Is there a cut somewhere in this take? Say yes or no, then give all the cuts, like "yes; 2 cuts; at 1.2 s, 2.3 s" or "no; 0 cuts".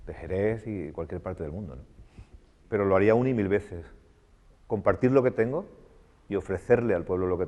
yes; 1 cut; at 2.6 s